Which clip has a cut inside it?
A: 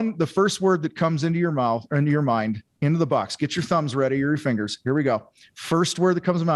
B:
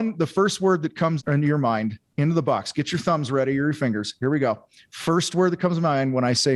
B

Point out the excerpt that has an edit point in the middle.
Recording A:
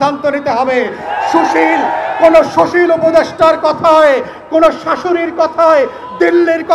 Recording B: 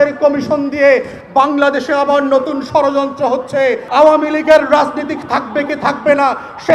B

